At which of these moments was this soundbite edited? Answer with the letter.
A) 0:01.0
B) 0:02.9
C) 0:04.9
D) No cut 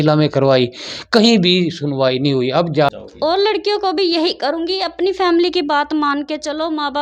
B